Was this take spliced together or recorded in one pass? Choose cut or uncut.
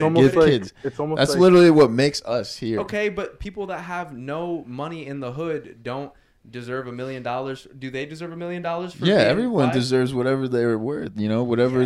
uncut